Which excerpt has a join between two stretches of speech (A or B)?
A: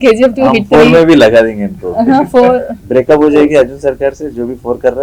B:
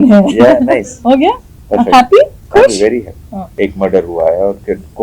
B